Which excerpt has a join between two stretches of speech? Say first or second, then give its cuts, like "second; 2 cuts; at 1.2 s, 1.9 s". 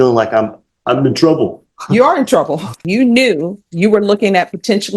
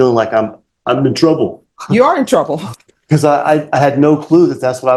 first; 1 cut; at 2.9 s